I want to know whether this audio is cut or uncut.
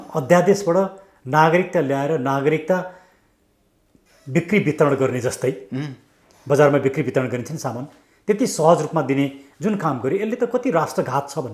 uncut